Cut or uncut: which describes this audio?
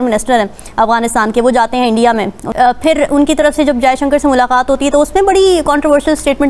cut